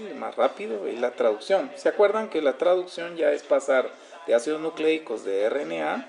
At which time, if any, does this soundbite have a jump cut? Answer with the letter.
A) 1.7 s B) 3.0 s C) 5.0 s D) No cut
B